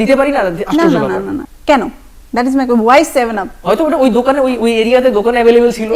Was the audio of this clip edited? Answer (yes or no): no